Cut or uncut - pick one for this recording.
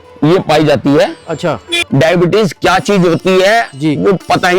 cut